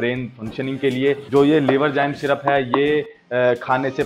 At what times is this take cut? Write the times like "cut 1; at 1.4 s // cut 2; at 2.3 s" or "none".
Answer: cut 1; at 1.2 s